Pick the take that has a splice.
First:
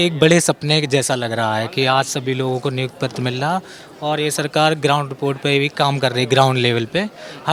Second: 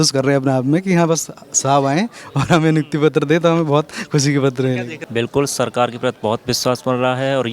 second; 1 cut; at 4.9 s

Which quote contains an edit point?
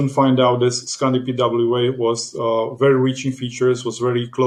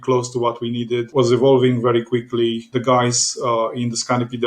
second; 2 cuts; at 1.1 s, 2.7 s

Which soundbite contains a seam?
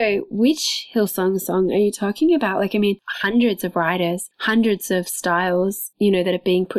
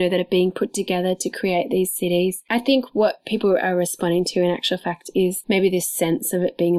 second; 1 cut; at 2.4 s

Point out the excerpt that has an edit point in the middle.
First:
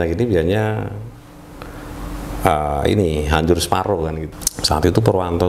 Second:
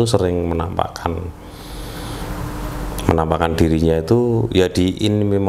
first; 1 cut; at 4.2 s

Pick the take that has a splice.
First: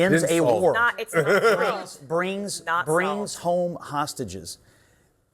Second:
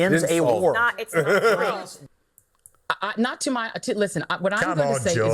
second; 1 cut; at 1.9 s

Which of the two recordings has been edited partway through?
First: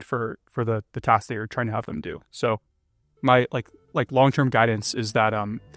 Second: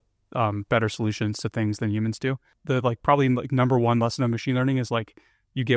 second; 1 cut; at 2.5 s

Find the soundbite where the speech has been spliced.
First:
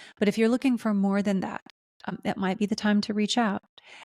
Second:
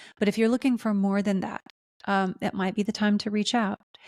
first; 1 cut; at 2.1 s

